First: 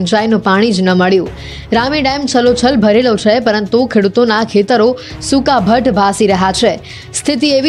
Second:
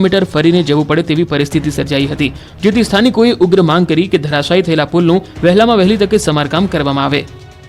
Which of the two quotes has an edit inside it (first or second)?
second